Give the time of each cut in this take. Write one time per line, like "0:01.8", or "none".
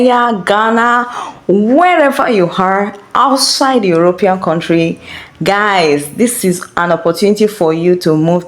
none